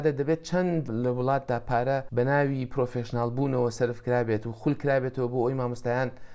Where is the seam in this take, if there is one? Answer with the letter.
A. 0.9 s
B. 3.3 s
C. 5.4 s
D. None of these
A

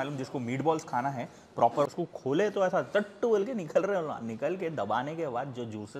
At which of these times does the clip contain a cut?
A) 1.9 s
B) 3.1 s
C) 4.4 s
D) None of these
A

